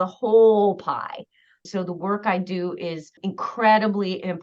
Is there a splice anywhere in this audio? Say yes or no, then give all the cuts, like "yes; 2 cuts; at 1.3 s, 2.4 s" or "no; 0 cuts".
yes; 1 cut; at 1.6 s